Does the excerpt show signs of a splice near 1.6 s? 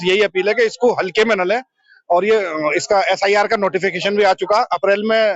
no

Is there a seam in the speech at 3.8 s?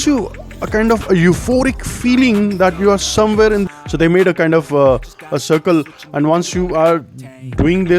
yes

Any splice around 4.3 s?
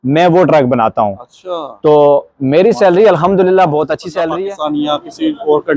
yes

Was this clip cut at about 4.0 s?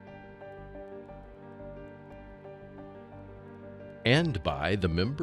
yes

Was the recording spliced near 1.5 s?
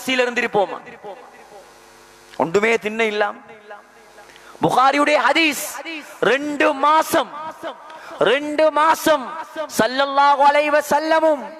no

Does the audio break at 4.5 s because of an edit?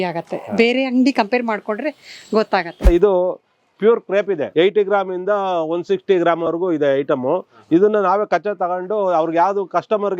yes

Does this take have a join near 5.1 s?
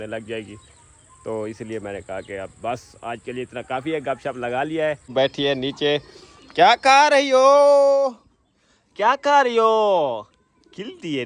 yes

